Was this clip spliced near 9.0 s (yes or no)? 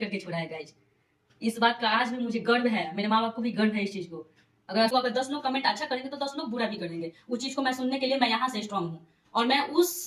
no